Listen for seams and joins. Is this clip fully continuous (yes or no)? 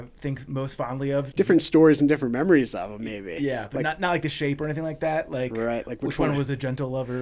no